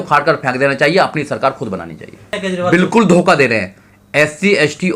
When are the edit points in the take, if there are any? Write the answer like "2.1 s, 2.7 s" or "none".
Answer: 2.3 s